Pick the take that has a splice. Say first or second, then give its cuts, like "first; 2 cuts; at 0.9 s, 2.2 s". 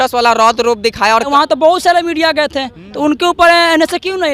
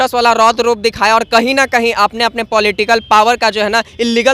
first; 1 cut; at 1.3 s